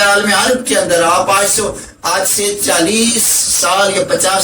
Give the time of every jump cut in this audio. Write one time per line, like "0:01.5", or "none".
none